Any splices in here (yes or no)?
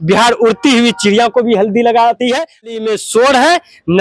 yes